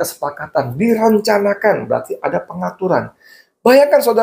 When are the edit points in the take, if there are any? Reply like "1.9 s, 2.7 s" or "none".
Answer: none